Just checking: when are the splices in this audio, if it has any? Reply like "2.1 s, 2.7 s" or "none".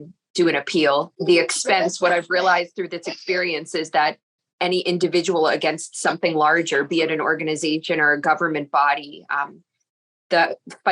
1.1 s